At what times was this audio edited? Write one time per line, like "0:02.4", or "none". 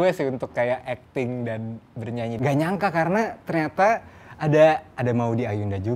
0:02.4